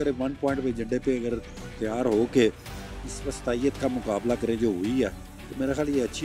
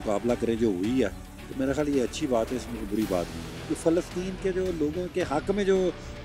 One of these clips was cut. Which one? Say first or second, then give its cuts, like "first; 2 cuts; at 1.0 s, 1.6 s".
second; 1 cut; at 3.5 s